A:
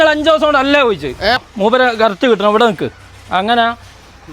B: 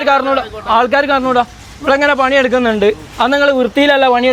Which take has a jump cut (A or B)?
A